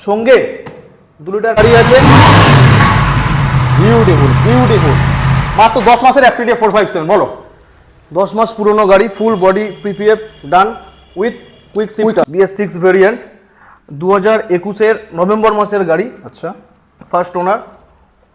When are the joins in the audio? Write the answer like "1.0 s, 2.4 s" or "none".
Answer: 1.6 s, 12.2 s